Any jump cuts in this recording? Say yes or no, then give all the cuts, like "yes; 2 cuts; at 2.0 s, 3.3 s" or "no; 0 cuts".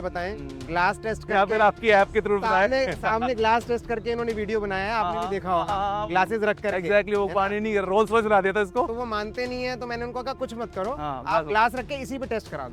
no; 0 cuts